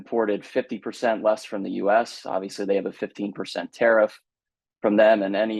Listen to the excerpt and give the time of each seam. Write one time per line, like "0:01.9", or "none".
none